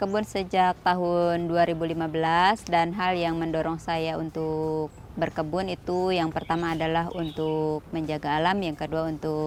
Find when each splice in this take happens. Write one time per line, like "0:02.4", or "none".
none